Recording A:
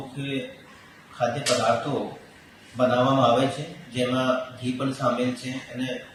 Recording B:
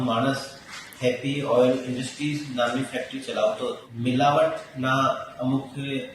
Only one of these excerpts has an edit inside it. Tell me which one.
B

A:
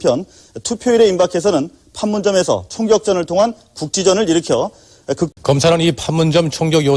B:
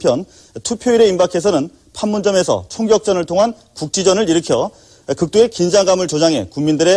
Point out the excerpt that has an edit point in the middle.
B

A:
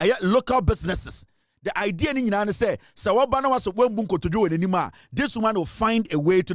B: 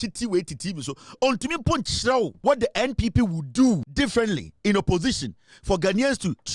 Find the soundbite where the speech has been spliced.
B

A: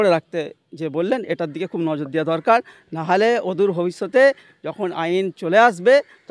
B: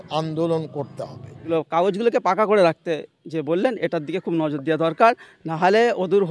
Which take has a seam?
B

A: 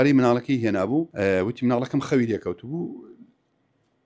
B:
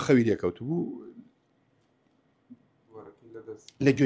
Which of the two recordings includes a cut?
A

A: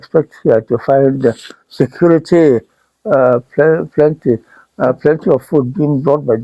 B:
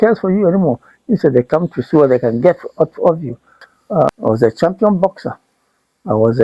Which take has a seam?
B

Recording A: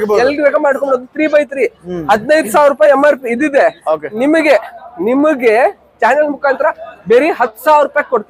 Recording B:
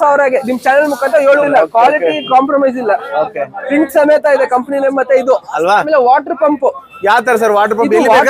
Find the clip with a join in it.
B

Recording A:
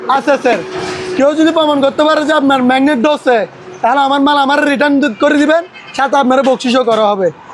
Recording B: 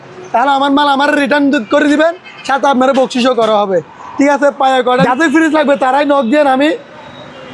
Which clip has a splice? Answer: B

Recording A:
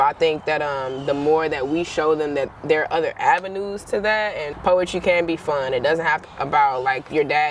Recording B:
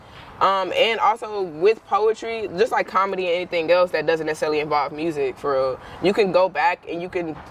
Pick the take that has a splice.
A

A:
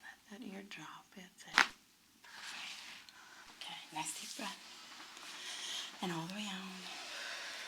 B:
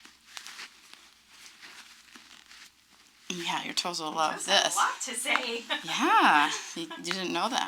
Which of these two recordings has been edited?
A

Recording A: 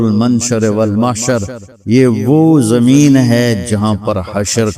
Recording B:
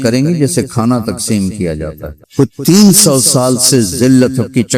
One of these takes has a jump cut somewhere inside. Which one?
B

